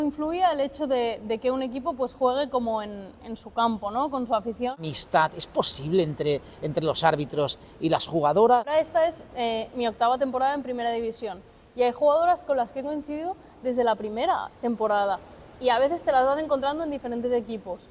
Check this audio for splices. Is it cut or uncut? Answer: cut